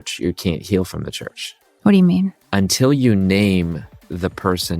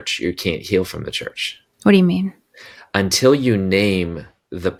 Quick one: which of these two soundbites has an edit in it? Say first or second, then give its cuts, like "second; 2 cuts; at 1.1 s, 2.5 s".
first; 1 cut; at 2.4 s